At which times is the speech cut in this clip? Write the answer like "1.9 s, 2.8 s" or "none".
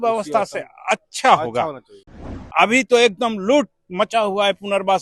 2.2 s